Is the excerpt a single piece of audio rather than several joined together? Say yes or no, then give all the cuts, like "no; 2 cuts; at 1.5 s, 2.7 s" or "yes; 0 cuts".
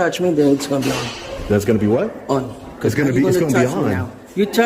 yes; 0 cuts